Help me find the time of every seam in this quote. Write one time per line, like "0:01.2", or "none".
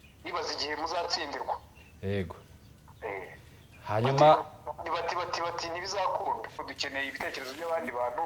0:06.7